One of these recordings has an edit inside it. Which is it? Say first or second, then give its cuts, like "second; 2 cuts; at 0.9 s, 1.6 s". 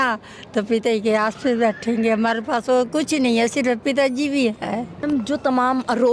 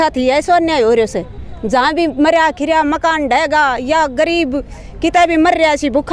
first; 1 cut; at 5.0 s